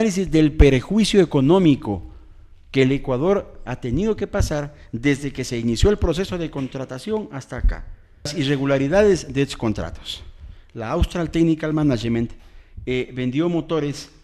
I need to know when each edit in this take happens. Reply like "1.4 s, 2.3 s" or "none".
8.3 s